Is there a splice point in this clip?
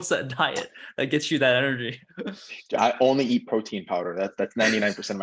no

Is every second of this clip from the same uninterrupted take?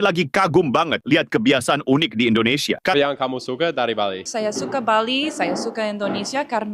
no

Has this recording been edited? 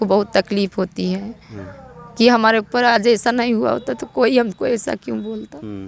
no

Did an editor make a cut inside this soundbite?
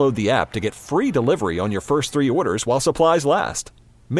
no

